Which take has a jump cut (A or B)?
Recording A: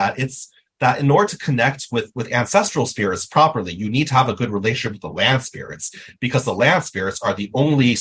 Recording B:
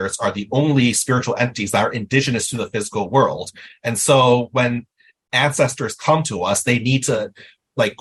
A